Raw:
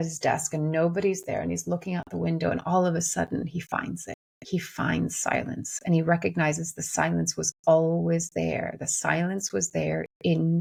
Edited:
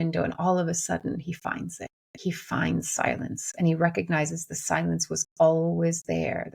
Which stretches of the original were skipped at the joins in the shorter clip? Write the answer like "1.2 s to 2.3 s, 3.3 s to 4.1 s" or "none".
none